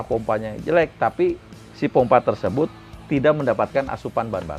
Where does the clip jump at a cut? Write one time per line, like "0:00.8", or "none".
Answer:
none